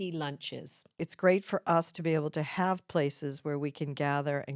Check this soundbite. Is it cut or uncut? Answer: cut